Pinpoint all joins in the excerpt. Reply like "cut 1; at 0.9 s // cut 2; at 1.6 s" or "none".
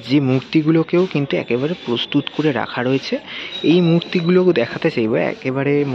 none